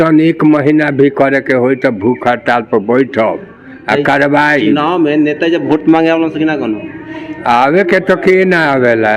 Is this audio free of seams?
yes; 0 cuts

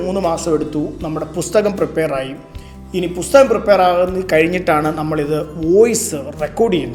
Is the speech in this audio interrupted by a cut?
no; 0 cuts

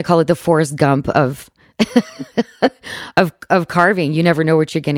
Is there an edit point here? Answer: no; 0 cuts

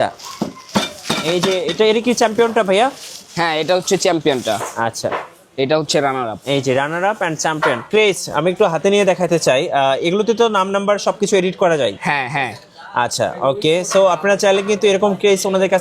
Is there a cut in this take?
yes; 1 cut; at 7.8 s

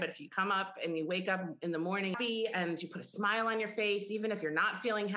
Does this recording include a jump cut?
yes; 1 cut; at 2.1 s

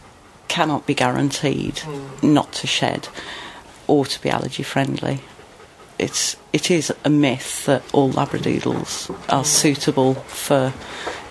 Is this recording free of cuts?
no; 2 cuts; at 3.7 s, 5.3 s

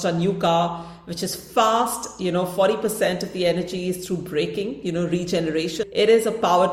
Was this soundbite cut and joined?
yes; 1 cut; at 5.8 s

